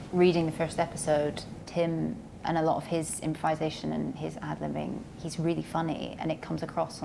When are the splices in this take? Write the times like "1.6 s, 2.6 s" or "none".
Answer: 1.6 s